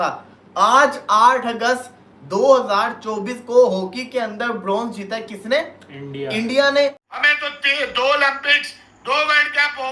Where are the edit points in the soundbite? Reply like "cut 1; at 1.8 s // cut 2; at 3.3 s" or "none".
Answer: cut 1; at 7.0 s